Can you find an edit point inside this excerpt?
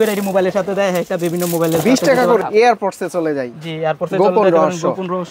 yes; 1 cut; at 2.4 s

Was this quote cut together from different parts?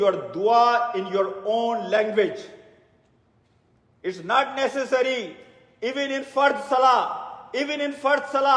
no; 0 cuts

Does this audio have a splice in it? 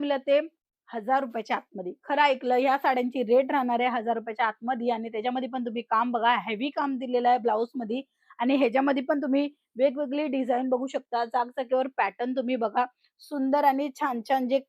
no; 0 cuts

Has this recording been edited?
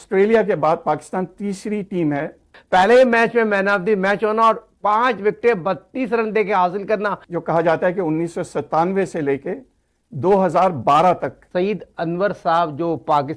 yes; 3 cuts; at 2.6 s, 7.2 s, 11.4 s

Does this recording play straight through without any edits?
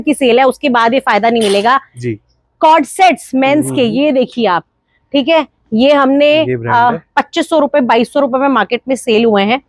yes; 0 cuts

